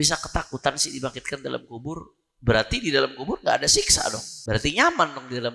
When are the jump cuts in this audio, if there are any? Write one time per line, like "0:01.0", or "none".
0:04.3